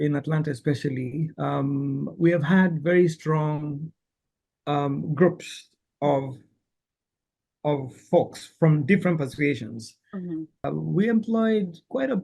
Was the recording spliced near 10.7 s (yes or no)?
yes